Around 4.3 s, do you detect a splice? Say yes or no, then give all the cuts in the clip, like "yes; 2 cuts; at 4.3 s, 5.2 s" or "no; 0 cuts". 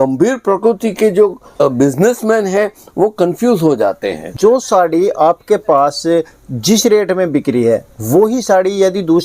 yes; 2 cuts; at 1.6 s, 4.3 s